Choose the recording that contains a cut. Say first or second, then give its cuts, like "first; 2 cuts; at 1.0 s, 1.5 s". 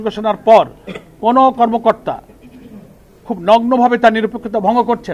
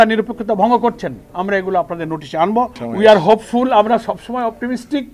second; 1 cut; at 2.8 s